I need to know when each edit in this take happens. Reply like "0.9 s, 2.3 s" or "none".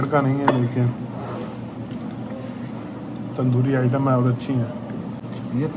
none